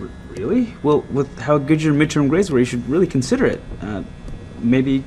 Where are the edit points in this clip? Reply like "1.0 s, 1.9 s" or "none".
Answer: 2.1 s